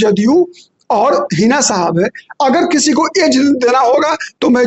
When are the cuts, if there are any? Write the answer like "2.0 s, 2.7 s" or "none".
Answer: none